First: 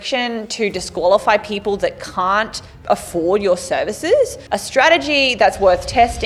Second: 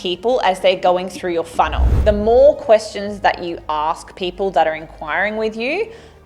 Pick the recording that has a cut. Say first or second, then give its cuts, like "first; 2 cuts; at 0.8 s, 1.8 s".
second; 1 cut; at 2.0 s